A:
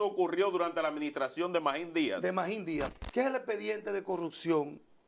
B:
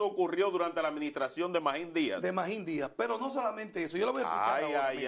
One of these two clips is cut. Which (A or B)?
A